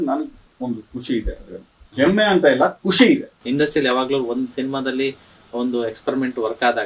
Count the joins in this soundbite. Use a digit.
1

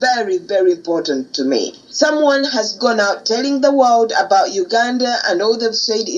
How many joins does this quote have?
1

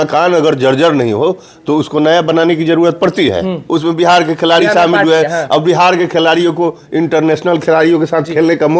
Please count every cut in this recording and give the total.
1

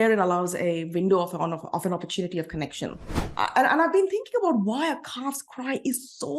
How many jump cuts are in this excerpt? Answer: 1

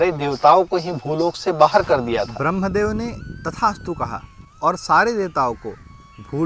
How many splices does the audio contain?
0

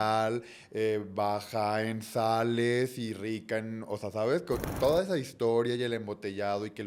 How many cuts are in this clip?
0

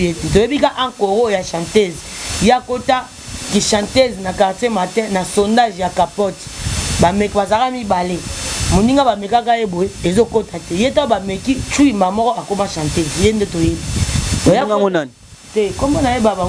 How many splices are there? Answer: 0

